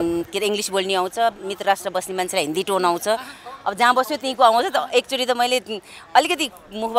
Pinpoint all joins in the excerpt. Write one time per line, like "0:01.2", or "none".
none

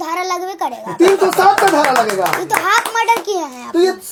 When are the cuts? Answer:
none

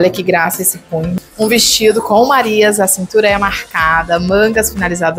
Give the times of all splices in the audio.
0:01.1

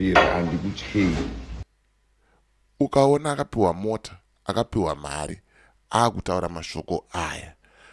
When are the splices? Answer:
0:01.6

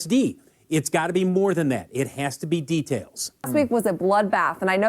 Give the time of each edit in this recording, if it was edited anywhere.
0:03.5

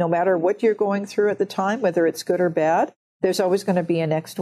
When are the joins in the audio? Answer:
0:03.0

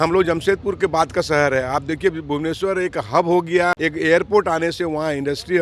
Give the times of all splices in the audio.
0:03.8

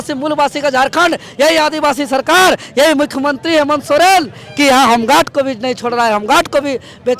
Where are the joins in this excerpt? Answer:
none

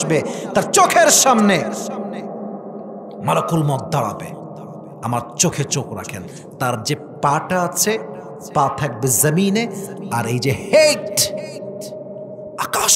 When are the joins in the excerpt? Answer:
none

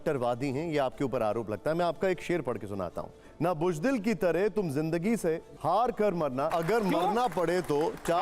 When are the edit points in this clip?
0:03.3
0:05.5
0:06.5

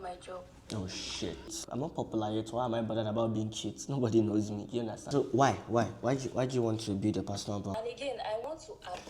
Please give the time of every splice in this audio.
0:01.6
0:05.1
0:07.7

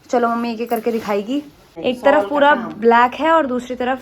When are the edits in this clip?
0:01.7

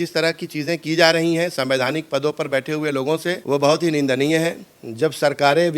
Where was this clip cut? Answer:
0:04.6

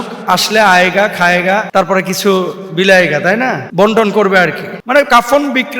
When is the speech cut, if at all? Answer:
0:01.7
0:03.6
0:05.0

